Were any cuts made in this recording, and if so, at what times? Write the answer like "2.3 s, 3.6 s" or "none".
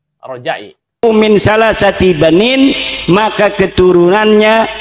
1.0 s